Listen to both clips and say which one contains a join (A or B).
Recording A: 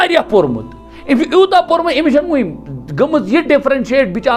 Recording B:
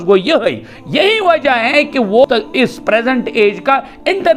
B